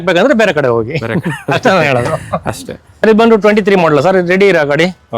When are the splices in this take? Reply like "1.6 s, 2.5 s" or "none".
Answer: 3.0 s